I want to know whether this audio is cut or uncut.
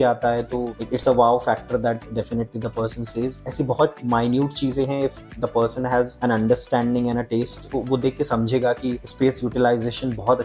uncut